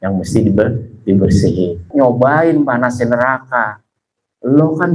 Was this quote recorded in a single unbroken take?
no; 1 cut; at 1.8 s

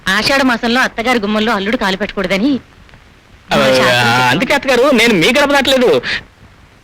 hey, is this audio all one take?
yes; 0 cuts

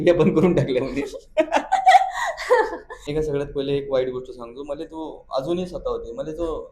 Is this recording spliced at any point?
yes; 1 cut; at 3.1 s

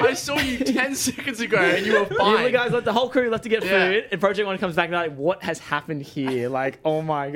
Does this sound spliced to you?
no; 0 cuts

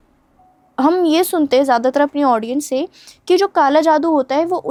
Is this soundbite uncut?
yes; 0 cuts

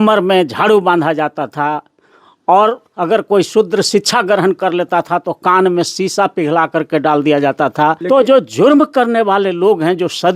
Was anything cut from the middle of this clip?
yes; 1 cut; at 8.0 s

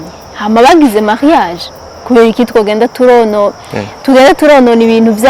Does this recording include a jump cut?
no; 0 cuts

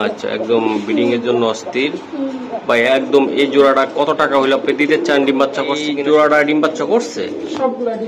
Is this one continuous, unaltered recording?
no; 1 cut; at 5.9 s

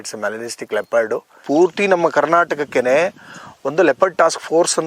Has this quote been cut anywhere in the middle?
yes; 1 cut; at 1.4 s

